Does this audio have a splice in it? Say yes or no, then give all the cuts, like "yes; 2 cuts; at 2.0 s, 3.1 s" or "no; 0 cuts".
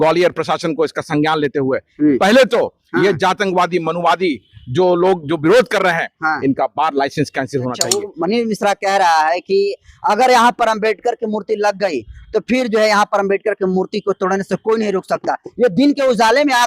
yes; 1 cut; at 7.9 s